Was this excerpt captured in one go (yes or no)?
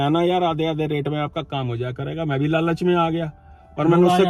yes